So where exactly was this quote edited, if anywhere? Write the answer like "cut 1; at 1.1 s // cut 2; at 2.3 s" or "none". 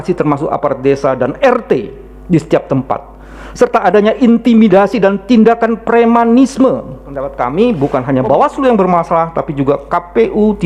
cut 1; at 7.3 s

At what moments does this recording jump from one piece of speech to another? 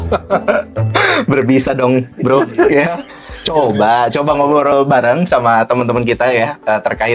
none

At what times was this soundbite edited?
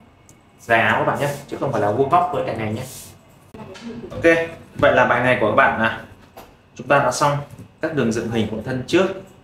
cut 1; at 3.6 s

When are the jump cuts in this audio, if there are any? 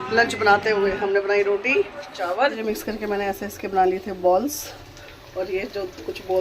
cut 1; at 2.5 s

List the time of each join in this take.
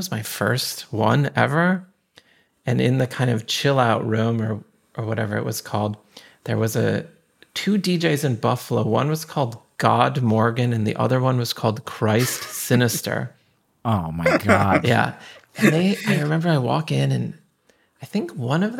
cut 1; at 15.2 s

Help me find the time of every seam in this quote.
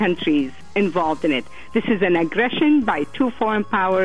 cut 1; at 1.6 s

